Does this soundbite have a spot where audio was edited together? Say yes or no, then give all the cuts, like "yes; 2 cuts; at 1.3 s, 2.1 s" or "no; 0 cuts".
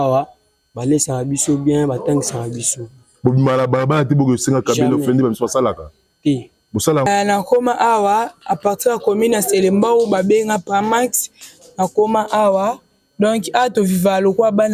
yes; 1 cut; at 7.1 s